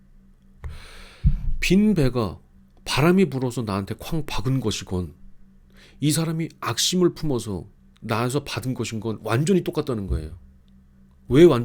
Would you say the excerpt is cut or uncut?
uncut